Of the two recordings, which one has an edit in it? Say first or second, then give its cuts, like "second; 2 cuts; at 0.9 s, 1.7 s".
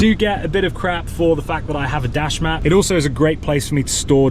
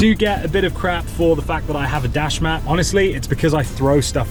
first; 1 cut; at 2.6 s